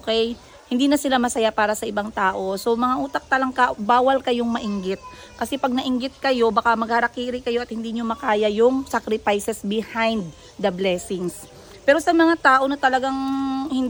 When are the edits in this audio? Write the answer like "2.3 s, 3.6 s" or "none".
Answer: none